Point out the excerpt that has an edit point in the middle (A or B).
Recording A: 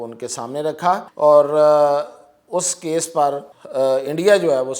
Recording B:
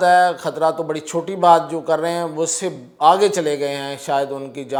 A